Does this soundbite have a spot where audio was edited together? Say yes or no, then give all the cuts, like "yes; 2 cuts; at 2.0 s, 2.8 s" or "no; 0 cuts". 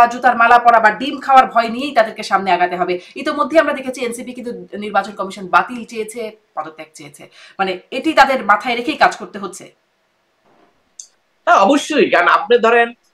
no; 0 cuts